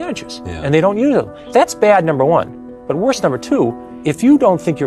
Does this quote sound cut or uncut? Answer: cut